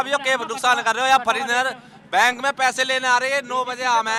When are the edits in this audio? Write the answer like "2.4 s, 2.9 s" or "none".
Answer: none

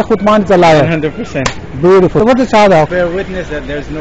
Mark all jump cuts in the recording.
2.2 s, 2.9 s

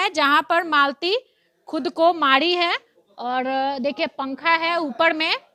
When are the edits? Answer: none

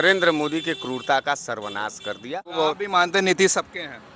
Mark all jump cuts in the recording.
2.5 s

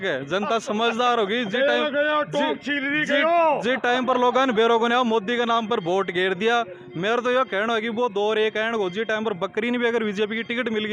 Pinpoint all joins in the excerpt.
none

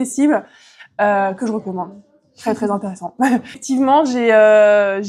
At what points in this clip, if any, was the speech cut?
3.6 s

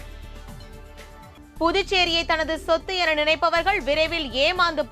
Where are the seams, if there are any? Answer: 1.4 s

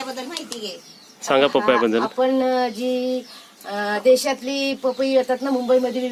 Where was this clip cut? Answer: none

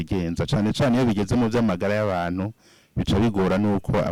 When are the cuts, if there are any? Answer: none

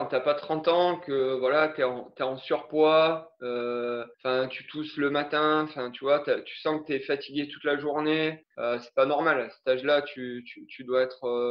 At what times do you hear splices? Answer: none

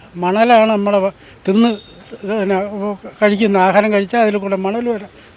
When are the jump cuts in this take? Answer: none

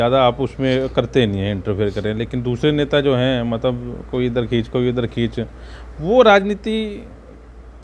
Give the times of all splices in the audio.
none

